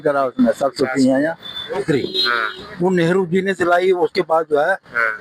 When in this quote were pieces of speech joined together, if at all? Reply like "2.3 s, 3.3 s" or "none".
1.8 s